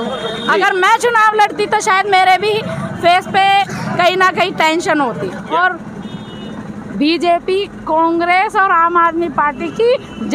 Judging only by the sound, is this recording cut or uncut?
cut